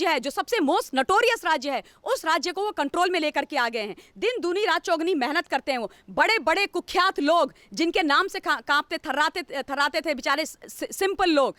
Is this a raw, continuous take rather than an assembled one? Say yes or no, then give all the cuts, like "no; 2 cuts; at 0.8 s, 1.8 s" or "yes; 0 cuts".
yes; 0 cuts